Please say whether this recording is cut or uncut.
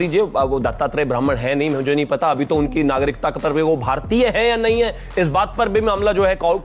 uncut